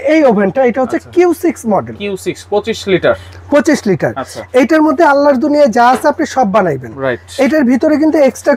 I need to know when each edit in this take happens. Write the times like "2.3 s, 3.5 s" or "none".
none